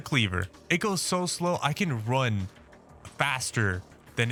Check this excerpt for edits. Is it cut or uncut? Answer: uncut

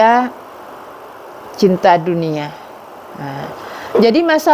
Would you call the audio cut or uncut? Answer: uncut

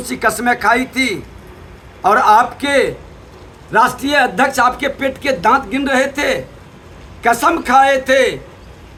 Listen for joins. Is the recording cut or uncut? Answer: uncut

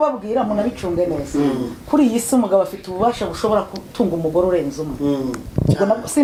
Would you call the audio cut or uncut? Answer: uncut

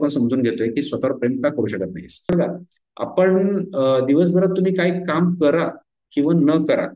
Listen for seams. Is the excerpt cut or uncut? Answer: cut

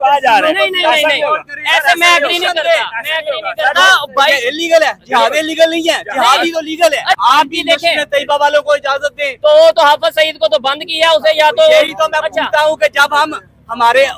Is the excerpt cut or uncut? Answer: cut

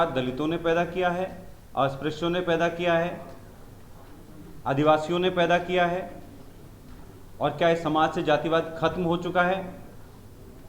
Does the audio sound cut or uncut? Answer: uncut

